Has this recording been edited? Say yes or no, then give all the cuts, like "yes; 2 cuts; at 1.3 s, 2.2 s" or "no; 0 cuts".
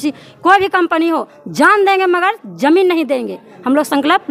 no; 0 cuts